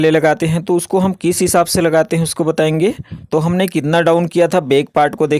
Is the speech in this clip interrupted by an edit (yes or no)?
yes